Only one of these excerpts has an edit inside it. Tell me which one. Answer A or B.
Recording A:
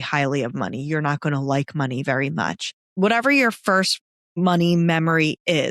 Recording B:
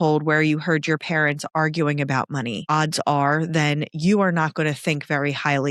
A